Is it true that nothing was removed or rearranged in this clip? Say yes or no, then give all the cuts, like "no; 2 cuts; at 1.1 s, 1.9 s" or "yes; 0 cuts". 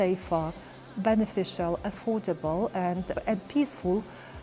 no; 1 cut; at 3.2 s